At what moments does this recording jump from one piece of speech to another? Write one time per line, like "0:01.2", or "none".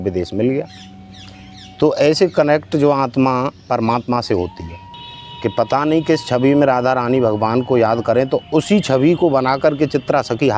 0:05.0